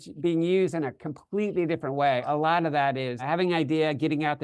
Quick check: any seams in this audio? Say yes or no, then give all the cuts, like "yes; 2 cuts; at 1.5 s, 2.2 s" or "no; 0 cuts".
yes; 2 cuts; at 2.2 s, 3.2 s